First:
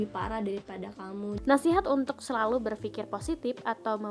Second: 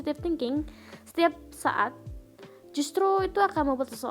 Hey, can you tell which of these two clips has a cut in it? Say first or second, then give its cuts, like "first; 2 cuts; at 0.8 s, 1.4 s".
first; 1 cut; at 1.4 s